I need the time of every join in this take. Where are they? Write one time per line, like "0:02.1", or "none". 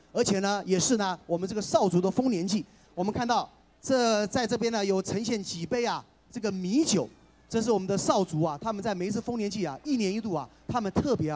none